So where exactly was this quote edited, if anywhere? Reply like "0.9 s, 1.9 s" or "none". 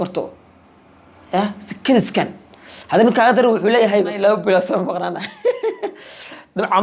4.1 s